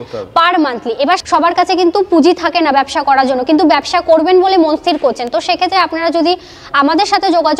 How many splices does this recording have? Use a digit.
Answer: 1